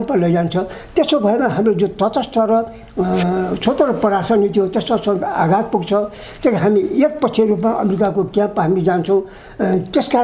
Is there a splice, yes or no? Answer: no